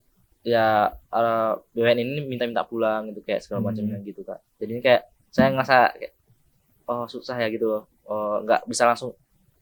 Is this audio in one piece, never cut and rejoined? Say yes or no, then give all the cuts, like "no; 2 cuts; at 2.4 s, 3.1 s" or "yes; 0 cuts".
yes; 0 cuts